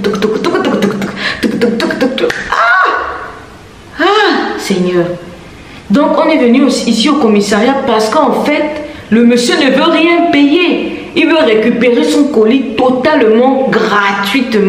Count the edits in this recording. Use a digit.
1